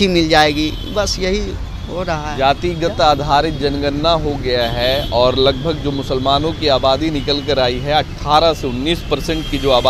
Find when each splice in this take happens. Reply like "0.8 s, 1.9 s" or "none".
none